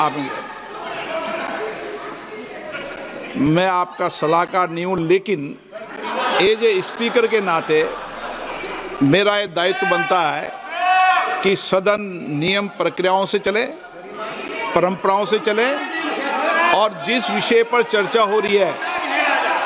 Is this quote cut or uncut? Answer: uncut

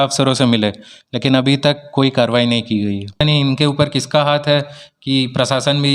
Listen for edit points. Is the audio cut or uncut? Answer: cut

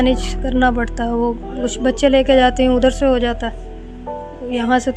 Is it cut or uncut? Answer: uncut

